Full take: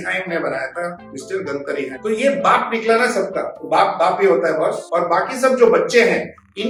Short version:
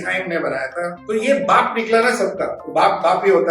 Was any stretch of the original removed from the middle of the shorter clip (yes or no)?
yes